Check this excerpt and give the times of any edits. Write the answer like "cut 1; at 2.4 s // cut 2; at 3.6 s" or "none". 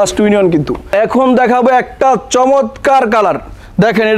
cut 1; at 0.9 s